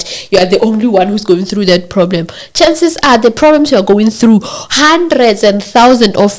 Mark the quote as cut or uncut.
uncut